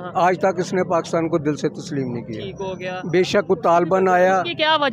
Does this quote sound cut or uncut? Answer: uncut